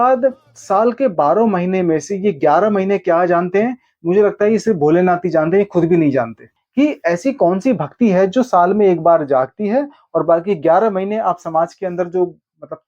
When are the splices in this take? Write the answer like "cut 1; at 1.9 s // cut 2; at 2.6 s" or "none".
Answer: cut 1; at 6.6 s